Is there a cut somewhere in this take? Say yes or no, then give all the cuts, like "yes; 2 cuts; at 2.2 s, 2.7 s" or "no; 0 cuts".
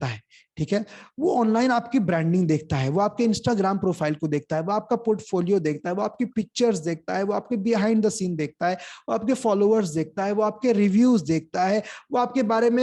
no; 0 cuts